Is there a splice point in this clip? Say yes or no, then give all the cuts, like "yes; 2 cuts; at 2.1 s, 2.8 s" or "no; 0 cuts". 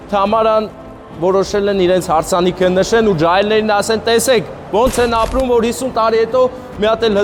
no; 0 cuts